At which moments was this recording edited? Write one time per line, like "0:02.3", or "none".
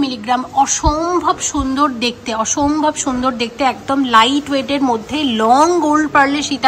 none